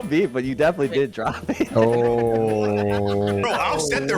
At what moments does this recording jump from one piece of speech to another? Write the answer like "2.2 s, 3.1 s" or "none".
3.3 s